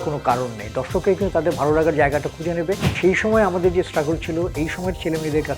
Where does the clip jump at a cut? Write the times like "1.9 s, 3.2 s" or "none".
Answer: 3.0 s